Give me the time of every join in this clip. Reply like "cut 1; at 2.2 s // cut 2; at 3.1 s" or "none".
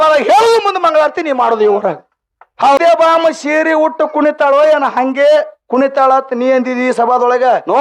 cut 1; at 2.8 s